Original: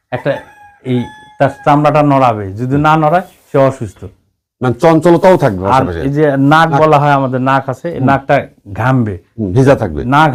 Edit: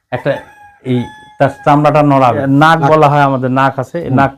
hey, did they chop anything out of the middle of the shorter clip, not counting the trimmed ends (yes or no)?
yes